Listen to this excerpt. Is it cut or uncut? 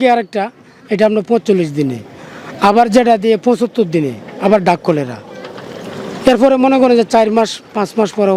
uncut